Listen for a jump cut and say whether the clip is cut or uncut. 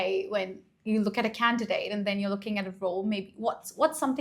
uncut